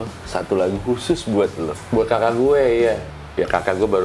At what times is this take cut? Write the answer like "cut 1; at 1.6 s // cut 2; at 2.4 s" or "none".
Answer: cut 1; at 1.8 s // cut 2; at 3.1 s